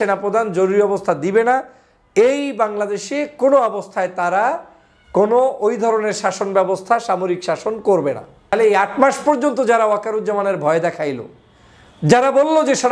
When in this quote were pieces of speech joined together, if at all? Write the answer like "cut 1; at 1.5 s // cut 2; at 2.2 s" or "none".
cut 1; at 8.5 s